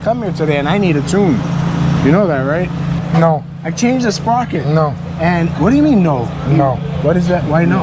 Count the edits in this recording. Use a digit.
0